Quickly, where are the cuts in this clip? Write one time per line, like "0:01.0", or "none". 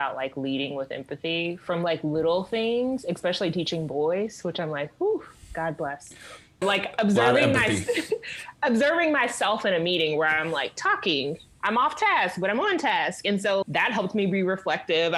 none

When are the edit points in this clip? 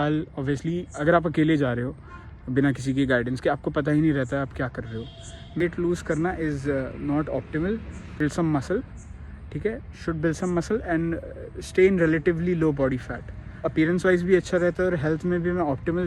0:05.6
0:08.2
0:13.7

